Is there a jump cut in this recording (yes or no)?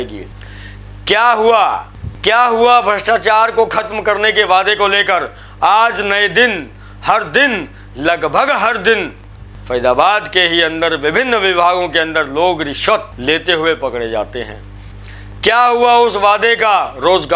yes